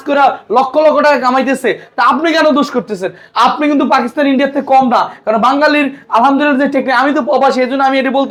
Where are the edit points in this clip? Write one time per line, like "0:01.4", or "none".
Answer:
none